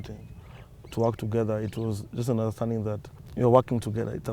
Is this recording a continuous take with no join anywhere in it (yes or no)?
no